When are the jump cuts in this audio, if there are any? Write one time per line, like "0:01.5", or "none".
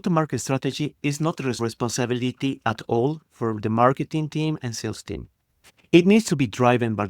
0:01.6